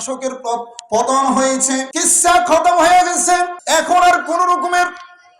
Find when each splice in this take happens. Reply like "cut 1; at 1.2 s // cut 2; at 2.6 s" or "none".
cut 1; at 1.9 s // cut 2; at 3.6 s